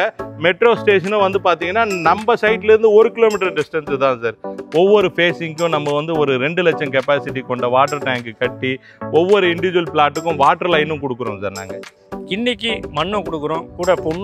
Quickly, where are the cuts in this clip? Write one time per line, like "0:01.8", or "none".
0:04.5
0:11.9